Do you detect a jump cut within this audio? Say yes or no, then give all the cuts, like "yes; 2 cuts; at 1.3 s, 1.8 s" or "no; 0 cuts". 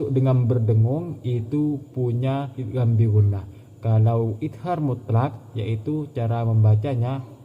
yes; 2 cuts; at 2.6 s, 4.4 s